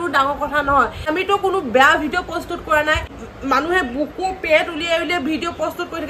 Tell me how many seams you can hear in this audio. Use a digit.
2